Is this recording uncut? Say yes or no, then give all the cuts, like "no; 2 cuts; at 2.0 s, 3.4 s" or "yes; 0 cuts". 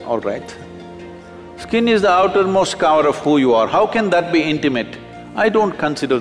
yes; 0 cuts